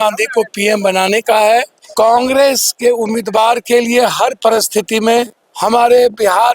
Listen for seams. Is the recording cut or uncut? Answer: cut